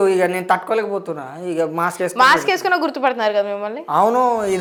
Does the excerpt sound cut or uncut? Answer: uncut